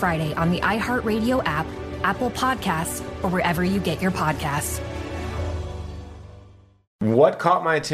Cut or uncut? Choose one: cut